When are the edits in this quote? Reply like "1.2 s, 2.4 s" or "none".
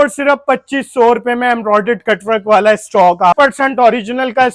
3.3 s